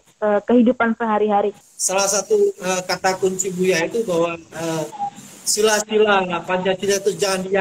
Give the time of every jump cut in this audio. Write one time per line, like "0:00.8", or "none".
0:01.6